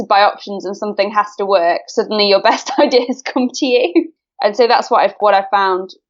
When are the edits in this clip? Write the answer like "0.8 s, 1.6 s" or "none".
5.2 s

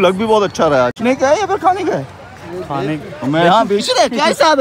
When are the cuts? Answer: 1.0 s

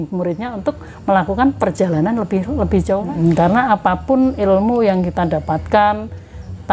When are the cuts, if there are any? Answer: 3.0 s

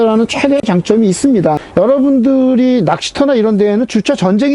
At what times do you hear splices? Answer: 1.6 s

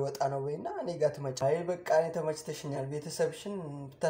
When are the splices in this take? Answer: 1.4 s

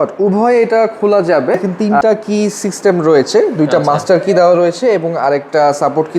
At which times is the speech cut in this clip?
1.8 s

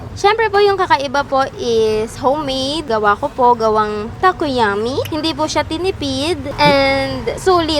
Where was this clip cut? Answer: 2.8 s, 5.1 s, 6.5 s

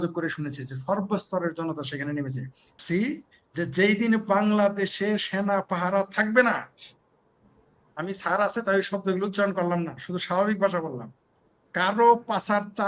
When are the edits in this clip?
2.8 s

